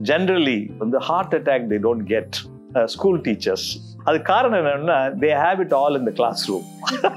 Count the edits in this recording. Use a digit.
2